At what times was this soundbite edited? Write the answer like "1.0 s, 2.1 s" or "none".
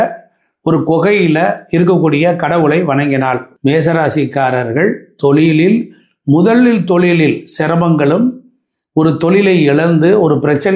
3.5 s

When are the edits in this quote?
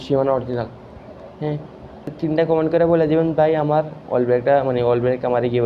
2.1 s

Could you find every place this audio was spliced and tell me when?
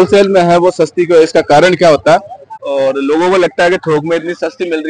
2.6 s

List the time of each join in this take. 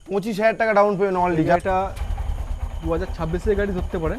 1.6 s

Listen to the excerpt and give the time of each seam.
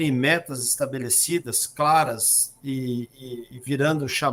none

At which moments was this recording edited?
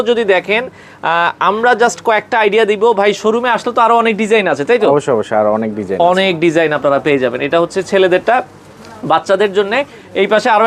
none

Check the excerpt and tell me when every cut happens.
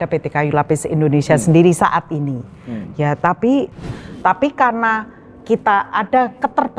3.9 s

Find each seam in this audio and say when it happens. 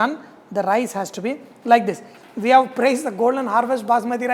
2.1 s

